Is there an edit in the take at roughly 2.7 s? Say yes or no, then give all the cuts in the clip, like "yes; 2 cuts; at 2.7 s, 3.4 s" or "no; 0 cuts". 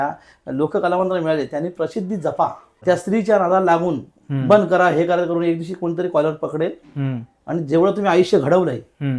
yes; 1 cut; at 2.7 s